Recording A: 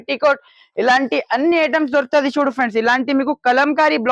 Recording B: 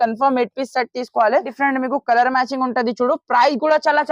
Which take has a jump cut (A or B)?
B